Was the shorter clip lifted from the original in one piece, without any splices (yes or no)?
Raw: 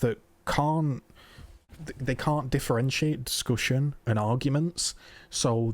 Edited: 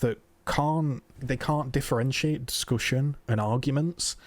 no